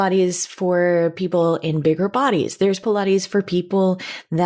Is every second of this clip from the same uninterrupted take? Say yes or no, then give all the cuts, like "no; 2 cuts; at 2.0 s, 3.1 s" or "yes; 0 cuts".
yes; 0 cuts